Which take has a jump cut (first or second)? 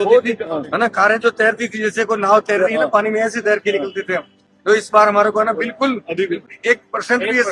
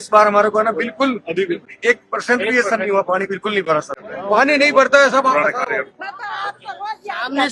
second